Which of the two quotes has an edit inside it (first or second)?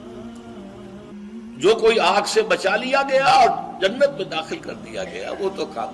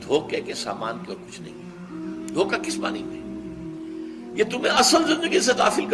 first